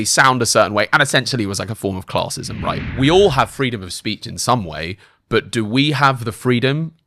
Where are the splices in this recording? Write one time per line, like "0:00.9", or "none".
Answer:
0:02.8